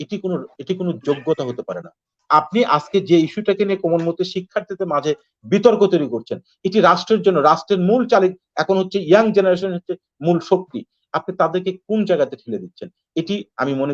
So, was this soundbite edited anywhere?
yes; 1 cut; at 2.1 s

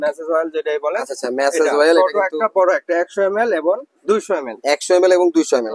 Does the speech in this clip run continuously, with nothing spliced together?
yes; 0 cuts

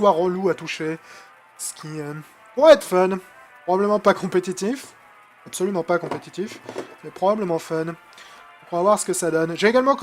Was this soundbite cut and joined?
yes; 1 cut; at 4.6 s

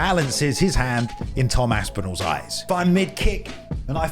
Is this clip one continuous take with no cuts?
no; 1 cut; at 2.7 s

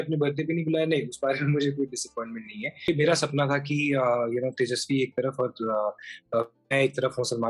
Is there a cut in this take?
yes; 1 cut; at 2.9 s

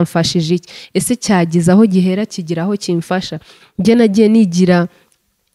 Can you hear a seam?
no; 0 cuts

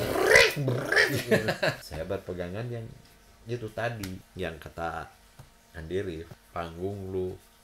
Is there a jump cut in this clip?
yes; 3 cuts; at 1.8 s, 4.2 s, 6.4 s

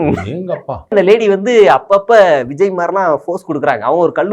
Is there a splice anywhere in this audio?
yes; 1 cut; at 0.9 s

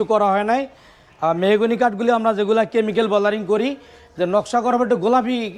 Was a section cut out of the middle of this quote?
no; 0 cuts

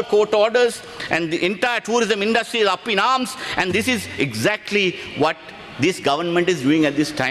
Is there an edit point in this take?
no; 0 cuts

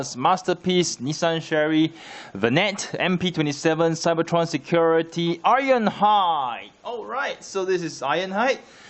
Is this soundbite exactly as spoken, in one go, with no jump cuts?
yes; 0 cuts

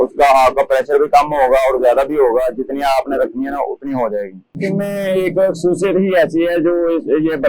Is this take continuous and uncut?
no; 1 cut; at 4.5 s

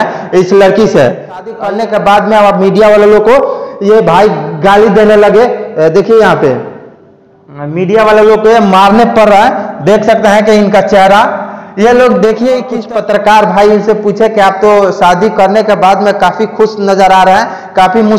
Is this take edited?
yes; 2 cuts; at 1.5 s, 12.8 s

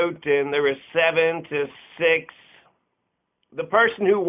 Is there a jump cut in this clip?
no; 0 cuts

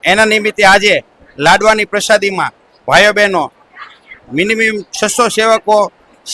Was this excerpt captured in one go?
yes; 0 cuts

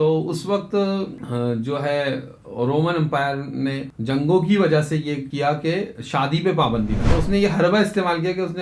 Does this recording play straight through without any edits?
no; 4 cuts; at 1.2 s, 3.9 s, 5.3 s, 7.0 s

